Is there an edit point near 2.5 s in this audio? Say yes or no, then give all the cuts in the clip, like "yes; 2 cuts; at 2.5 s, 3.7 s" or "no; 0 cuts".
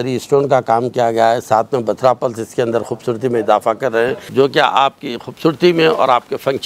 no; 1 cut; at 4.2 s